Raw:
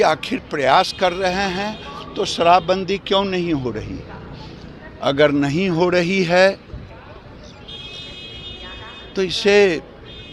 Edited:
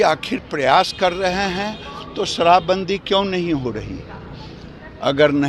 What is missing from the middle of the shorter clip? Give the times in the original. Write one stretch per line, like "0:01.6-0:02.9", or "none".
none